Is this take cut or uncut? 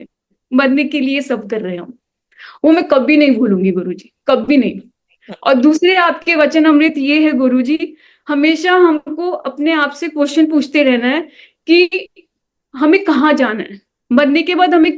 uncut